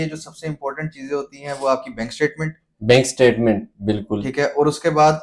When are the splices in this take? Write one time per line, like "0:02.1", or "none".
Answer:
none